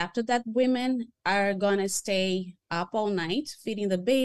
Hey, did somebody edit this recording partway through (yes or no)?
yes